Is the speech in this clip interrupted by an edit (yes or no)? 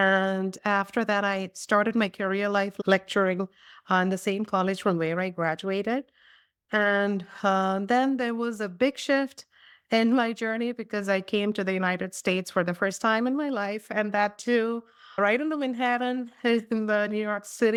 no